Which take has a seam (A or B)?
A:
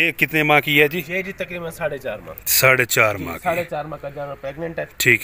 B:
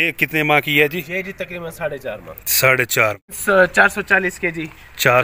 B